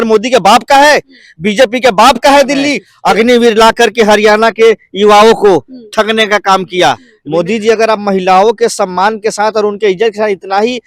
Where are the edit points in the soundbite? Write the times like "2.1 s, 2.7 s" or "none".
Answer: 2.9 s, 7.1 s